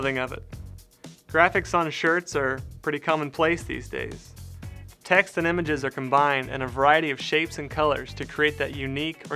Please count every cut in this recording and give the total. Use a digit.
1